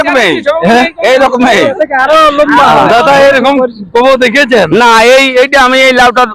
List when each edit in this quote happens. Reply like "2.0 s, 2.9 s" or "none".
1.8 s